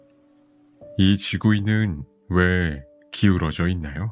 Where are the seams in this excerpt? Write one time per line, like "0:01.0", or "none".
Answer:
0:01.0